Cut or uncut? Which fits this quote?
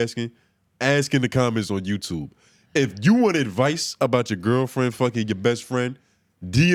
uncut